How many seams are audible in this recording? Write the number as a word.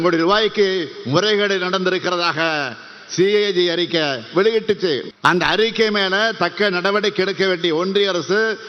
one